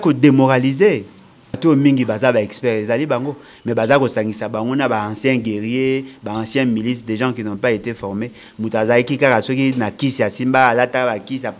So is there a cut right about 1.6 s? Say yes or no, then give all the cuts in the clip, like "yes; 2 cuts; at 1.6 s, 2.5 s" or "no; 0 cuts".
yes; 1 cut; at 1.6 s